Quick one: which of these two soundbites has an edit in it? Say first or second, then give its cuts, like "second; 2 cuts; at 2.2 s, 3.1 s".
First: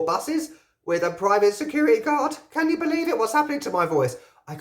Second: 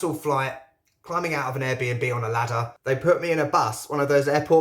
second; 1 cut; at 2.7 s